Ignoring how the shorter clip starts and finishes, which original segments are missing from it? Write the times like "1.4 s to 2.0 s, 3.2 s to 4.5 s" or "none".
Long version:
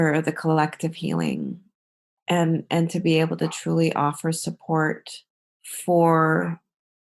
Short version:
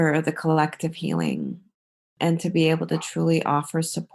2.1 s to 2.6 s